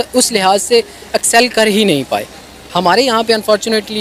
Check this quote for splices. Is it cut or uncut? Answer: cut